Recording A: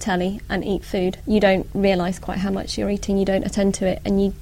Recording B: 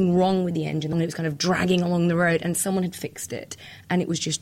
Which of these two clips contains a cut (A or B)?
B